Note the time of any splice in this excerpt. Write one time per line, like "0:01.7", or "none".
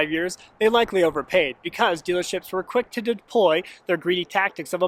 none